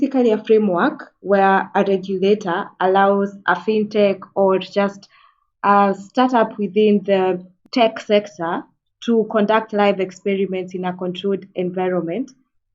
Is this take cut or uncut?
cut